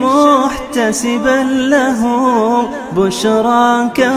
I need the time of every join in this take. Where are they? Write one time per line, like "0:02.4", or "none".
none